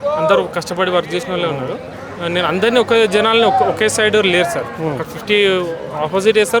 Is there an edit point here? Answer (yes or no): yes